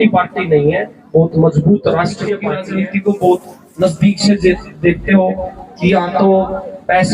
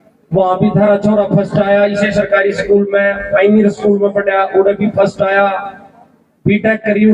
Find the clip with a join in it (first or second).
first